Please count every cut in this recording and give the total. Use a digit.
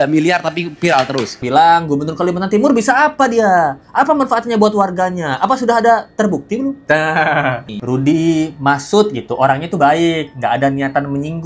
2